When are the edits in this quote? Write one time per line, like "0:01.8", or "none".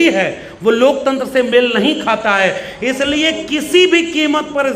none